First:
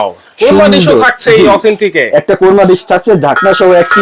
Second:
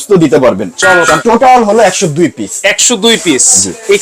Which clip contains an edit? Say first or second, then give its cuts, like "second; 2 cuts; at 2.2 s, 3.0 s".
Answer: second; 1 cut; at 1.2 s